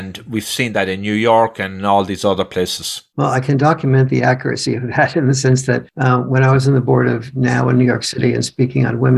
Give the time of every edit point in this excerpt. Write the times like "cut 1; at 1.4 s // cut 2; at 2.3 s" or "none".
cut 1; at 5.9 s